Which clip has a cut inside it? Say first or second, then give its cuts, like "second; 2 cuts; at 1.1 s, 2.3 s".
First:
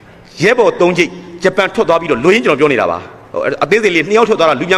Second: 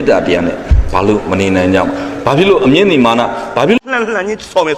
second; 1 cut; at 3.8 s